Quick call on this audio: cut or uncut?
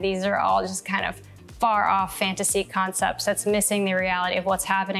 uncut